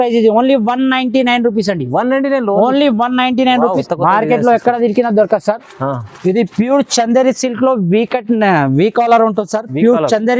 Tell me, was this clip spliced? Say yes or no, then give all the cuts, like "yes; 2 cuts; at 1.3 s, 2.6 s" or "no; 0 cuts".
yes; 1 cut; at 3.8 s